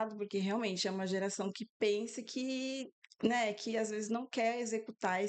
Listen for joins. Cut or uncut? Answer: uncut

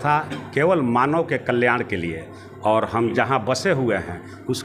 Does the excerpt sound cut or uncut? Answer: uncut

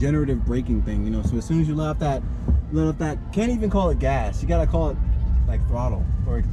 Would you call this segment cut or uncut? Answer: uncut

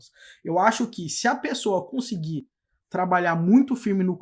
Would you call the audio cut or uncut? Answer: uncut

